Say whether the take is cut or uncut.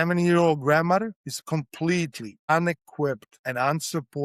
cut